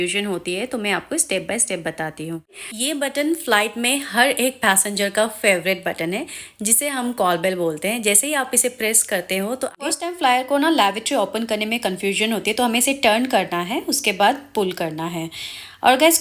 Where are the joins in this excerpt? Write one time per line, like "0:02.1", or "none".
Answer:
0:02.6
0:09.8